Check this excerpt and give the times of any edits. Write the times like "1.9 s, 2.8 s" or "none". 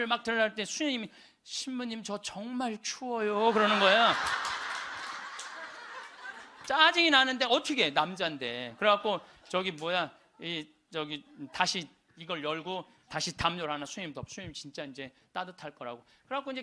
none